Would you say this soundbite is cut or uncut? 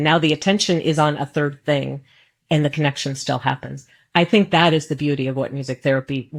uncut